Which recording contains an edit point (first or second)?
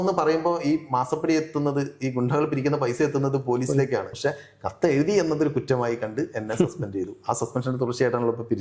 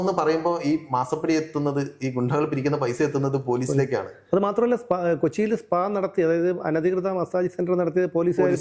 first